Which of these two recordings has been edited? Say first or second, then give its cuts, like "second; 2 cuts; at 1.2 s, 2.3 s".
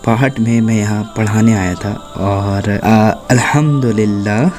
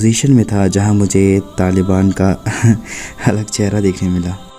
first; 1 cut; at 2.8 s